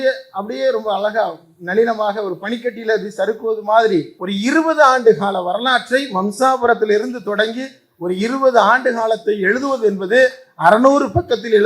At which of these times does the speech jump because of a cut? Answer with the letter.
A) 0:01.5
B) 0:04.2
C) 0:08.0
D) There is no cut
B